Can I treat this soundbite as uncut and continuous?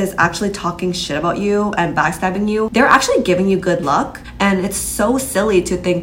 no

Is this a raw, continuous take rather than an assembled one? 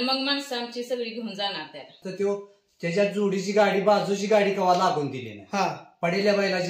no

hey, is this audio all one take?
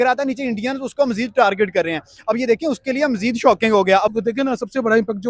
no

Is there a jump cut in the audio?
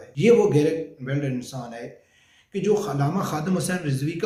no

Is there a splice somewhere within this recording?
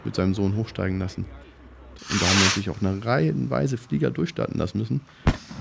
yes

